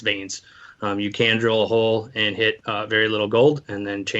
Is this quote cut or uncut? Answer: cut